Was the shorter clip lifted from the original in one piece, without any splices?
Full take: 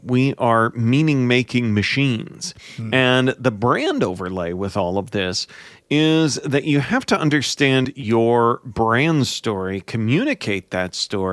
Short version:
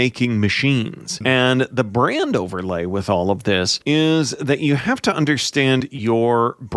no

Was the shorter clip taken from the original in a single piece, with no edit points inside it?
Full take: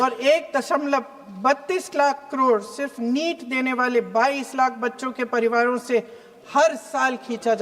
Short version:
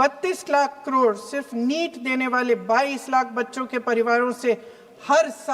yes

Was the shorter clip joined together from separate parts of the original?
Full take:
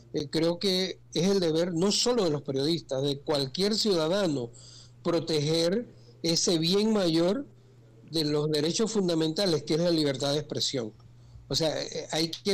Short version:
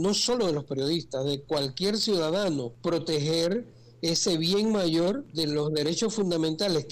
yes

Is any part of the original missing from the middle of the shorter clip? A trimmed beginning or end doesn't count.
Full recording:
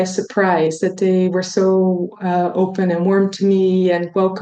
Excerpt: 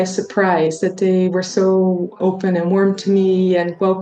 yes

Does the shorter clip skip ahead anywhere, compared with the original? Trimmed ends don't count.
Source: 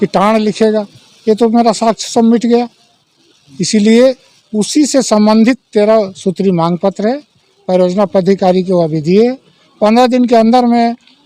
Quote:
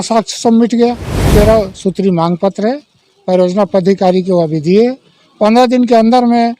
yes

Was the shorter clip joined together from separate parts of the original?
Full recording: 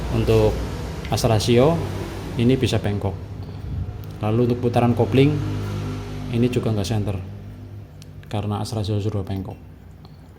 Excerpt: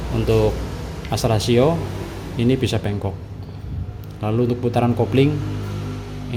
no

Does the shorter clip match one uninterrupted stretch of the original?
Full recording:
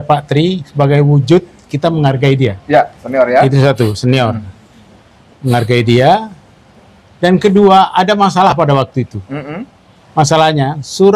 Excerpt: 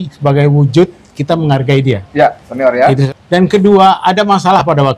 no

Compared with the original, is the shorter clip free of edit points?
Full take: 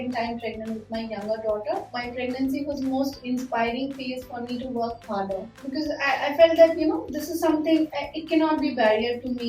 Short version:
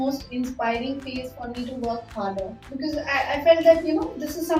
yes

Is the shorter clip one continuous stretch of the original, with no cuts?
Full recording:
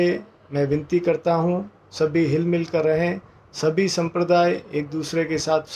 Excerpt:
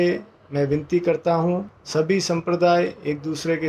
no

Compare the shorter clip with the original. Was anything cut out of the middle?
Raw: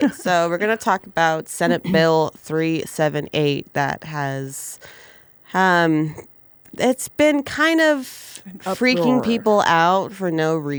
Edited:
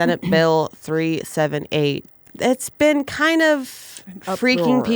yes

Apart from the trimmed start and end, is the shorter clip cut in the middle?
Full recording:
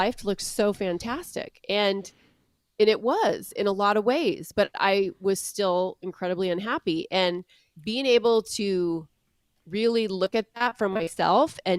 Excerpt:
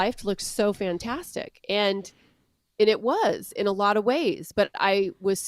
no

